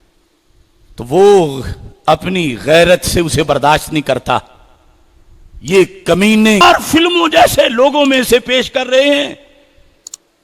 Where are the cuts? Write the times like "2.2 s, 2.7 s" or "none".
6.6 s